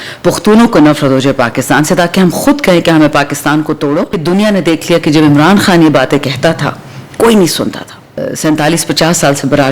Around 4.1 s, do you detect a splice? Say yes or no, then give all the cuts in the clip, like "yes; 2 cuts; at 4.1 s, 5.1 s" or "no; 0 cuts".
yes; 2 cuts; at 4.1 s, 8.3 s